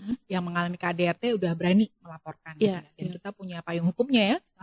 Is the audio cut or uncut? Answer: uncut